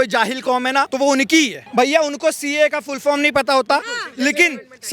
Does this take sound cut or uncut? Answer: cut